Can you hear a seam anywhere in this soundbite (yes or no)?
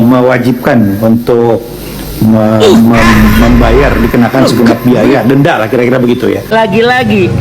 yes